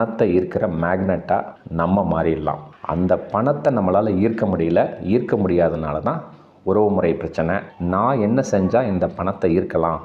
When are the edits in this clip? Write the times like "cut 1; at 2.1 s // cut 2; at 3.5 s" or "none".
cut 1; at 2.8 s // cut 2; at 7.7 s